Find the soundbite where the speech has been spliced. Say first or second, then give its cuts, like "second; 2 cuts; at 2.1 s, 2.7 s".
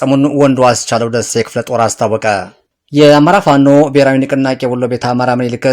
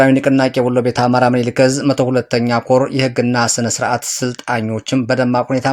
first; 1 cut; at 2.6 s